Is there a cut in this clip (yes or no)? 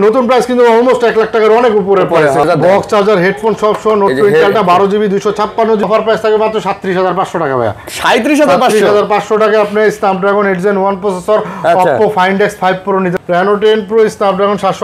yes